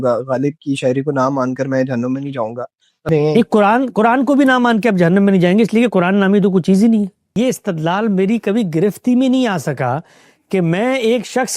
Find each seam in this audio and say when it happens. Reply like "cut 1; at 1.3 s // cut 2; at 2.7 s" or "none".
cut 1; at 3.1 s // cut 2; at 7.3 s